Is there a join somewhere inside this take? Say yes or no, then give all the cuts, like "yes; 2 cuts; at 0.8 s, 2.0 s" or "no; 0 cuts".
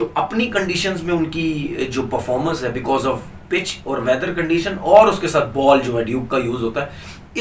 no; 0 cuts